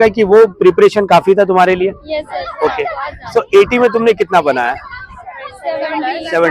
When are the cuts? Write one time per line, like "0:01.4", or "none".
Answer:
none